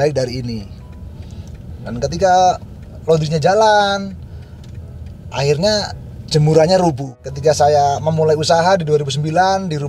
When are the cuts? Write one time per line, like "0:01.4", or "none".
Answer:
0:07.1